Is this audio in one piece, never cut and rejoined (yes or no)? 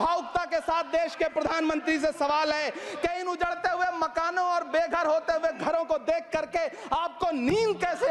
yes